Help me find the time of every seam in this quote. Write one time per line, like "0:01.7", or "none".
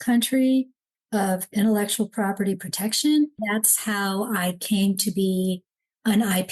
0:03.4

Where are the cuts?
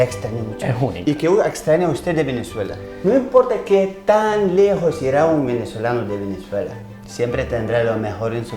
0:02.8

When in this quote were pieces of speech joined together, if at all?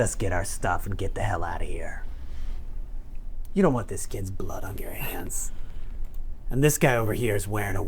0:03.4

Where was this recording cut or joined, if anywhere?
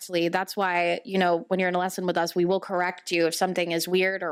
none

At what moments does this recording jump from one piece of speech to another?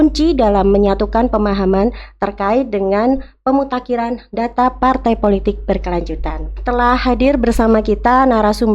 0:06.6

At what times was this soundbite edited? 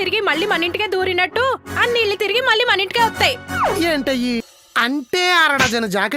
0:04.5

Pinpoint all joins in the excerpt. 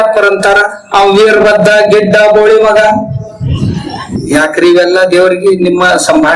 none

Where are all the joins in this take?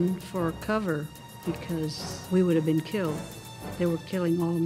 0:02.1

